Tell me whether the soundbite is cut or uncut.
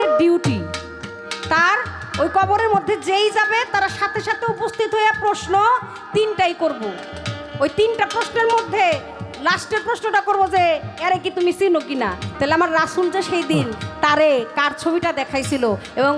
uncut